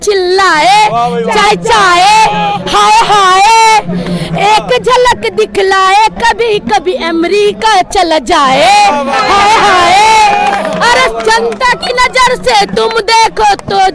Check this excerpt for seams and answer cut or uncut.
uncut